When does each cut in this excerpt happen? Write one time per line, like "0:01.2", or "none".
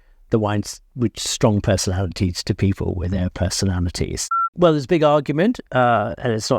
0:04.4